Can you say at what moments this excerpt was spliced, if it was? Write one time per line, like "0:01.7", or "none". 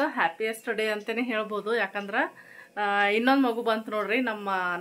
none